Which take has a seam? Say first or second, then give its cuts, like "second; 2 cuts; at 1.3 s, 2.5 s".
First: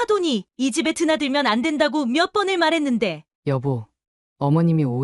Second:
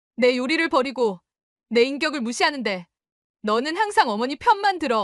first; 1 cut; at 3.3 s